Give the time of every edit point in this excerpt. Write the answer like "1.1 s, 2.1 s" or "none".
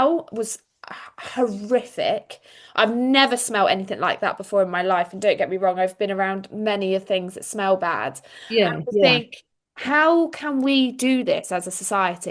none